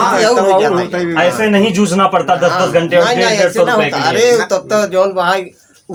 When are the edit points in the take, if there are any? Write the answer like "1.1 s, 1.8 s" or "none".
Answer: none